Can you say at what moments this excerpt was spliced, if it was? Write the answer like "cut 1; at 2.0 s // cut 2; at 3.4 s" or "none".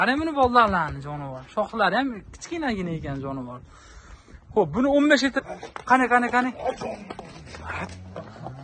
cut 1; at 5.4 s